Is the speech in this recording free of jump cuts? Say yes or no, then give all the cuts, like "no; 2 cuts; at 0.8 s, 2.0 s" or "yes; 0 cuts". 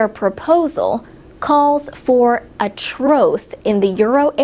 yes; 0 cuts